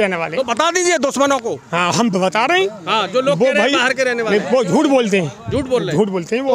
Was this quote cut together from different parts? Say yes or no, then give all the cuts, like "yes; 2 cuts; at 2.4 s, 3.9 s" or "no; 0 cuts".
no; 0 cuts